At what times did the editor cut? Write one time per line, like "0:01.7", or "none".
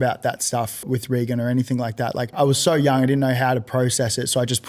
0:00.8
0:02.3